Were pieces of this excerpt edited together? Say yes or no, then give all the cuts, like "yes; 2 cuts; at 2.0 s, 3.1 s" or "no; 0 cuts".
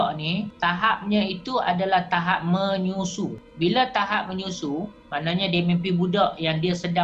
no; 0 cuts